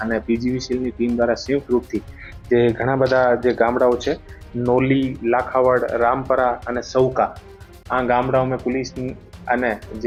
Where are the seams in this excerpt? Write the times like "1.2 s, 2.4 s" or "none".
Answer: none